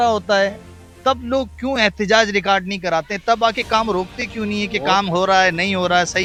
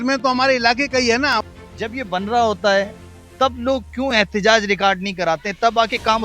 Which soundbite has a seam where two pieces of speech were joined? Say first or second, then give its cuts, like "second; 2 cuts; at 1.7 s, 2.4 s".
second; 1 cut; at 1.4 s